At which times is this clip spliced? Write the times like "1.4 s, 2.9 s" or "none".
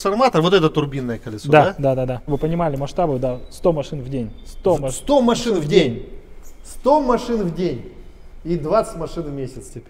2.3 s